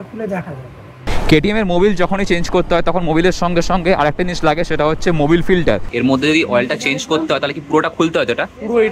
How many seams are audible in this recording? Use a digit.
2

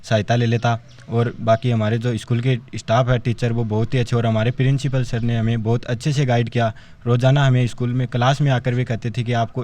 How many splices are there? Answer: 0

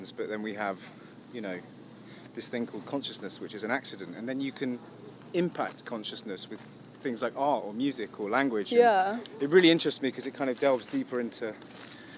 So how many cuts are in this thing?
0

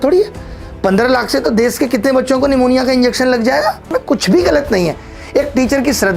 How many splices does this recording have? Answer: 1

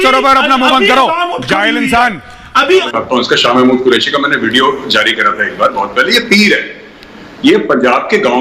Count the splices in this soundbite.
1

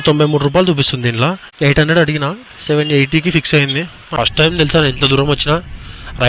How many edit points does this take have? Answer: 1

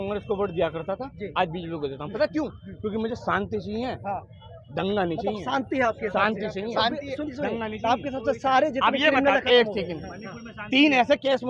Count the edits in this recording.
0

